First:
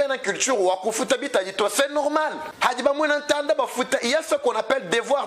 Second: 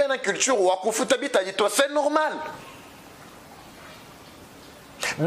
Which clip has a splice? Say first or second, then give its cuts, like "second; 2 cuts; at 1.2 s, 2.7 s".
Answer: first; 1 cut; at 2.5 s